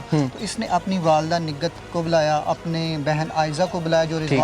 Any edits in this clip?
no; 0 cuts

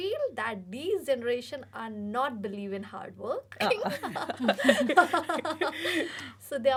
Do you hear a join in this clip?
no; 0 cuts

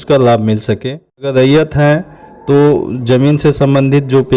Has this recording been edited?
yes; 1 cut; at 1.3 s

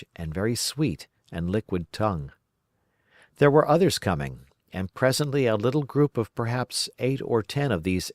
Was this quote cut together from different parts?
no; 0 cuts

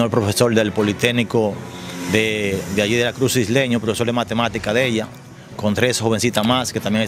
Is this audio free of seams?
yes; 0 cuts

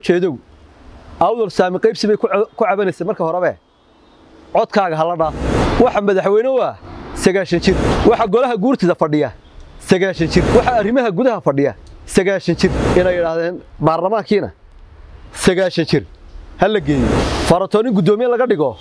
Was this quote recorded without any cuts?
no; 5 cuts; at 5.6 s, 7.9 s, 10.6 s, 12.8 s, 17.2 s

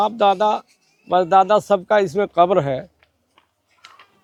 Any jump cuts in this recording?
no; 0 cuts

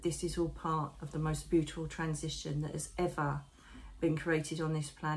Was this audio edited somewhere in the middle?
no; 0 cuts

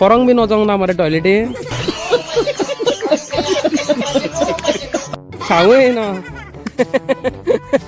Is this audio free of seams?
yes; 0 cuts

